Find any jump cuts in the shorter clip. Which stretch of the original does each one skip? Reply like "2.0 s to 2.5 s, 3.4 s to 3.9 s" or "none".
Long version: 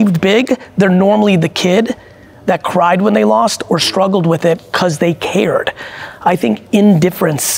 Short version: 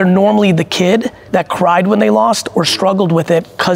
2.0 s to 2.3 s